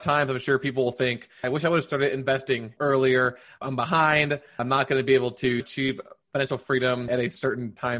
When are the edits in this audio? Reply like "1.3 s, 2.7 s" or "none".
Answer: 1.4 s